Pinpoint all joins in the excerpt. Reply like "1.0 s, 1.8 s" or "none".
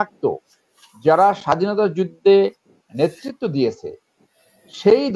none